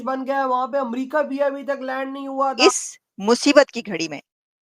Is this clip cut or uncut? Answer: cut